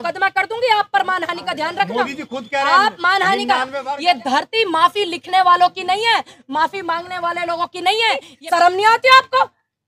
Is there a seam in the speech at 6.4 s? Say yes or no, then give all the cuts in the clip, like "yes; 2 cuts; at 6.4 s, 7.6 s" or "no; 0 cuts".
no; 2 cuts; at 3.8 s, 8.3 s